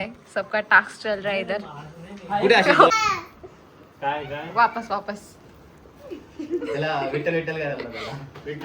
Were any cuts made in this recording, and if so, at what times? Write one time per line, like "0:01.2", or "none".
0:03.0